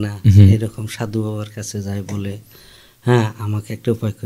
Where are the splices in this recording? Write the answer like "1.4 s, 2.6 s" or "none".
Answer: none